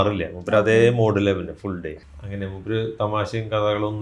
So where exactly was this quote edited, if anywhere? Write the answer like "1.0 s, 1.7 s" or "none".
1.9 s